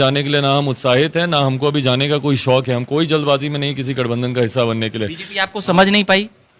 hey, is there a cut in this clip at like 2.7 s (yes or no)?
no